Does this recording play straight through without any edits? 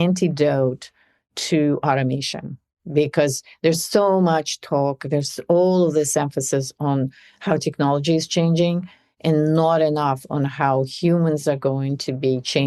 yes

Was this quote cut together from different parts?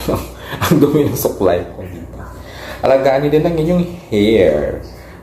no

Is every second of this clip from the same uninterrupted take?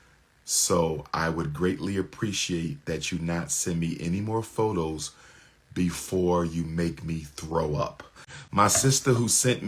no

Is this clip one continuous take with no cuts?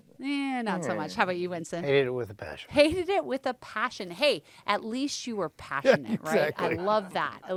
yes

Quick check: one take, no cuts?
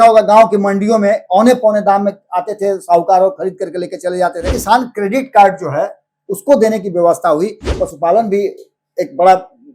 no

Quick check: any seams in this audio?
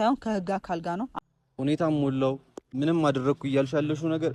yes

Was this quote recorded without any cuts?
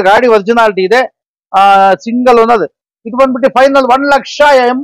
yes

